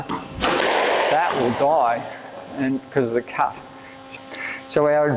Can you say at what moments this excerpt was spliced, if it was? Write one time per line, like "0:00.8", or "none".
0:04.0